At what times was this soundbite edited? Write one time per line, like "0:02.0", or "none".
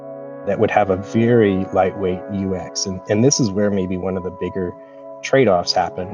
none